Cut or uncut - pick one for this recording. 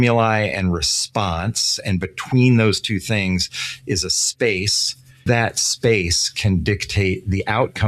cut